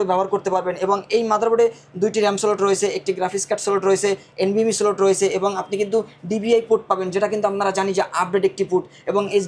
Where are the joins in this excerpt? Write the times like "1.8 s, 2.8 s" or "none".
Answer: none